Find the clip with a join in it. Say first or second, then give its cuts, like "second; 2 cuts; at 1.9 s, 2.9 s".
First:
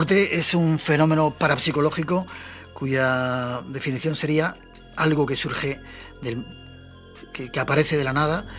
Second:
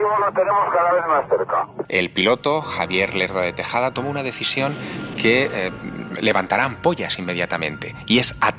second; 1 cut; at 1.8 s